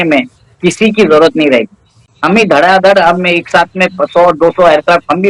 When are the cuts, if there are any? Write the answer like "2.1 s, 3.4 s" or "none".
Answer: none

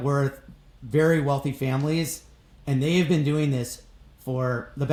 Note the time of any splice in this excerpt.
none

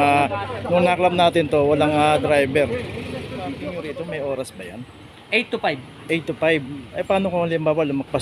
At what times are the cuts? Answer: 3.6 s

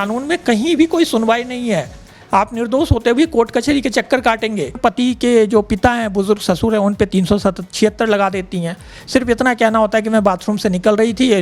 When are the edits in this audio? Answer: 4.8 s

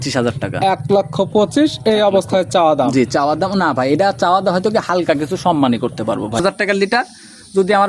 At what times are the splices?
6.4 s

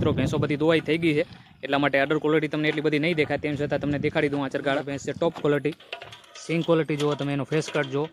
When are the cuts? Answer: 4.9 s

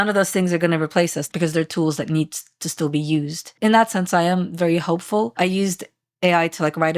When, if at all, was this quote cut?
1.3 s, 5.3 s

